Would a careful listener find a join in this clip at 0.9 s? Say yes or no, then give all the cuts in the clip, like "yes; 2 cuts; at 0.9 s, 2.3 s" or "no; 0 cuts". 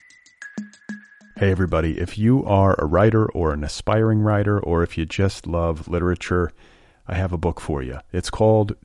yes; 1 cut; at 0.9 s